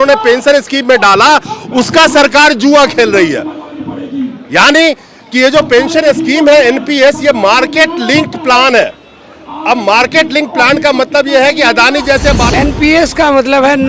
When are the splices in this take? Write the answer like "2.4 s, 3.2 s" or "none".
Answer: 12.4 s